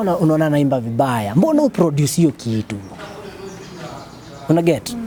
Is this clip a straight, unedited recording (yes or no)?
yes